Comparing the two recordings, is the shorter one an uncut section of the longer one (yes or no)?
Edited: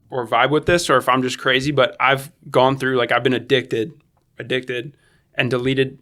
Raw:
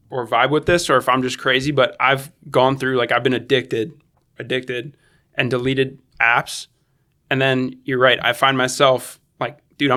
yes